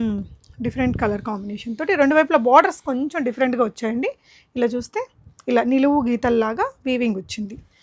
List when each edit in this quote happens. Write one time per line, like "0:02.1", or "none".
none